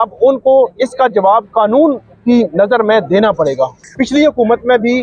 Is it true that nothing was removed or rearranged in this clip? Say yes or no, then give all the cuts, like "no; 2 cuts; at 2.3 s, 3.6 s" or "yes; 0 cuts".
no; 1 cut; at 3.8 s